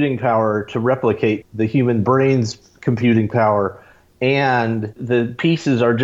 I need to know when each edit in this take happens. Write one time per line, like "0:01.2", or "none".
0:01.4
0:05.0